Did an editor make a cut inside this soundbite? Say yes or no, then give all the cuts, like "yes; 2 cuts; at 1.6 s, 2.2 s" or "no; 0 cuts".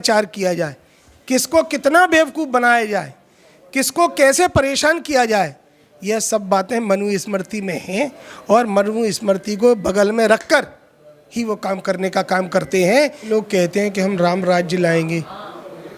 yes; 1 cut; at 13.3 s